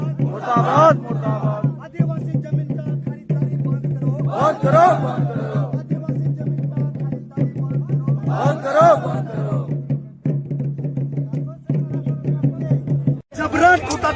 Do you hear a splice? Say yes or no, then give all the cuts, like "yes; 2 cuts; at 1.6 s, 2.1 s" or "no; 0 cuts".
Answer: yes; 1 cut; at 12.6 s